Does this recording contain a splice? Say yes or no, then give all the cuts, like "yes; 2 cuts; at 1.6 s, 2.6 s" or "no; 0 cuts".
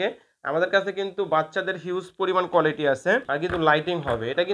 yes; 1 cut; at 3.3 s